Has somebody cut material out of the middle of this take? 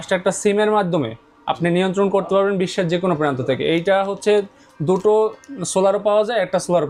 no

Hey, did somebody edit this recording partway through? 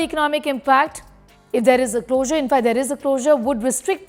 no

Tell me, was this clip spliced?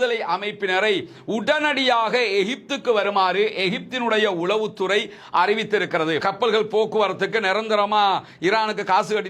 yes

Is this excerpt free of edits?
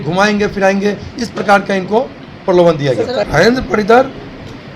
no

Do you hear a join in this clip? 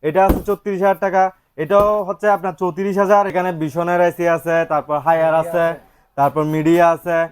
yes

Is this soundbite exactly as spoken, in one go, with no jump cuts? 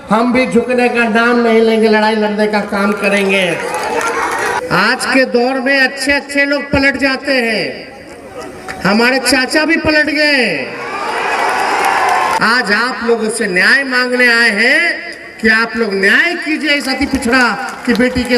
no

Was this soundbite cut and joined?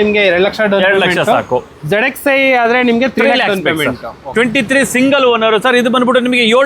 yes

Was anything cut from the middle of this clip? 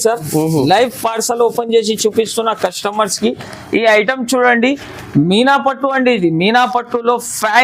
no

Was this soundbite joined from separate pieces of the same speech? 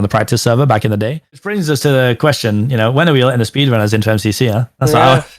yes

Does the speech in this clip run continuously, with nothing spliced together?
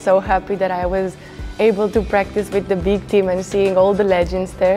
yes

